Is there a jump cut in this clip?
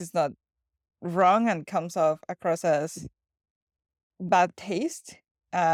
no; 0 cuts

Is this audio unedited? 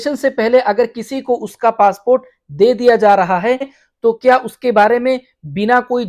yes; 0 cuts

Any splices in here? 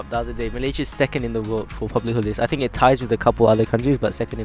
no; 0 cuts

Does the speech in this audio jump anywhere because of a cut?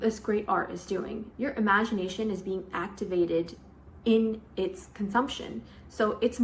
yes; 1 cut; at 1.2 s

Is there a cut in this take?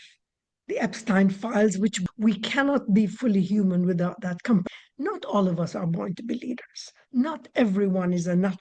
yes; 2 cuts; at 2.0 s, 4.6 s

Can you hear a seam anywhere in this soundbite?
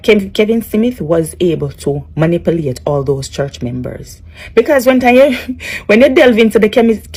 no; 0 cuts

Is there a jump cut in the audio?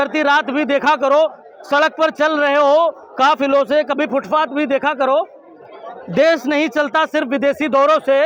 no; 0 cuts

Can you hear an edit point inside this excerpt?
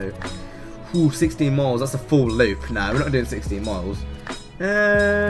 yes; 1 cut; at 1.3 s

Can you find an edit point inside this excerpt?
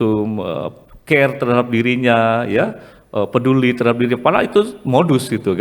no; 0 cuts

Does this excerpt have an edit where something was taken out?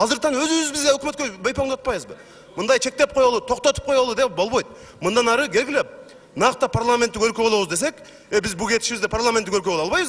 no; 0 cuts

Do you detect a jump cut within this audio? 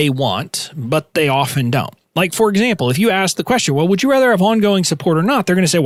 no; 0 cuts

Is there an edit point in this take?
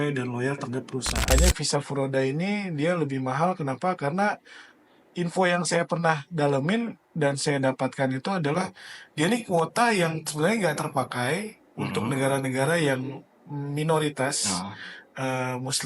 yes; 1 cut; at 1.4 s

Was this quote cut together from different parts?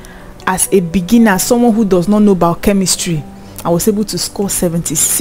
no; 0 cuts

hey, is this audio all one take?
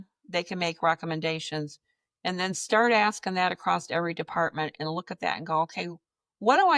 yes; 0 cuts

